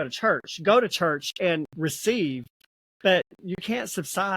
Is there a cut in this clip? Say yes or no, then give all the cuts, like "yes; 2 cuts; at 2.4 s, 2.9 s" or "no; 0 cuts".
yes; 1 cut; at 3.4 s